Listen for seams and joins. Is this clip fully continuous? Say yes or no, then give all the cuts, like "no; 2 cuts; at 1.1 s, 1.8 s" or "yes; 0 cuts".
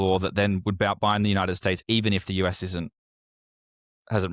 yes; 0 cuts